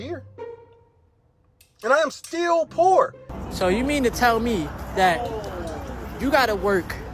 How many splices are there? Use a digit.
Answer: 1